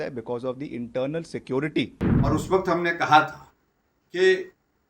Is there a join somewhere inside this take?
yes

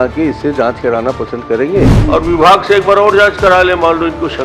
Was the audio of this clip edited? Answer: yes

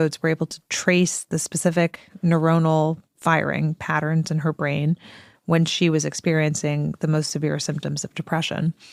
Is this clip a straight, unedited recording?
yes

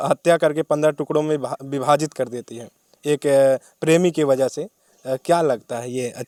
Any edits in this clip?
no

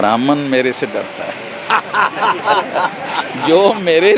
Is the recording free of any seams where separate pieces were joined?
yes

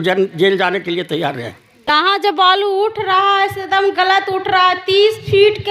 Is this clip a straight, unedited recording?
no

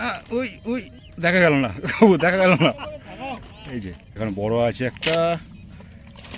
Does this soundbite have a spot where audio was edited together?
yes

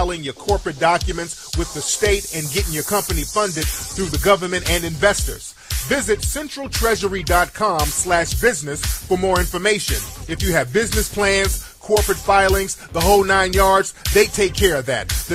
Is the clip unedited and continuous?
yes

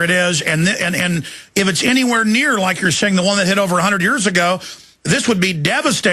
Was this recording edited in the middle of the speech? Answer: yes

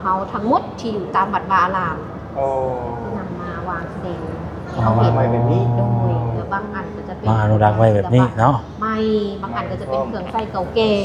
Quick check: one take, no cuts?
yes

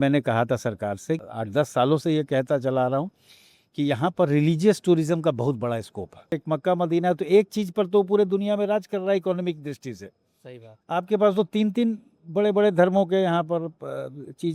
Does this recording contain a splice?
yes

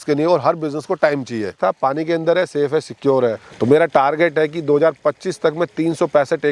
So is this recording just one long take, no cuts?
no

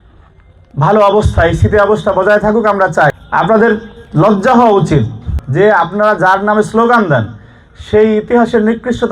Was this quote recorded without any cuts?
no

